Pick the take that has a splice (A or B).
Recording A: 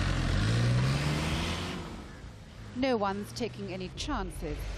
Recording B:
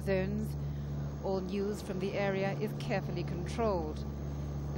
A